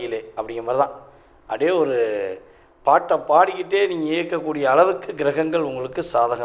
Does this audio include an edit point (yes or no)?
no